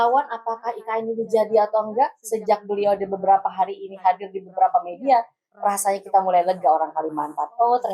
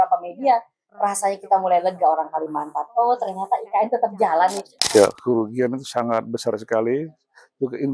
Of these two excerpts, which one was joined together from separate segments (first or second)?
second